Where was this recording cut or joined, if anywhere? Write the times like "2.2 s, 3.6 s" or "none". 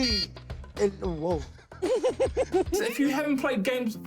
2.8 s